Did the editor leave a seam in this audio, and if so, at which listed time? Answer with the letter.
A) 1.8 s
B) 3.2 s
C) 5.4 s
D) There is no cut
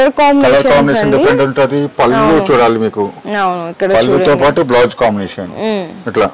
D